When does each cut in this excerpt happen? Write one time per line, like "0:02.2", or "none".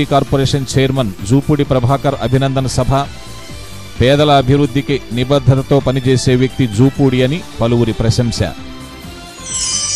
0:08.5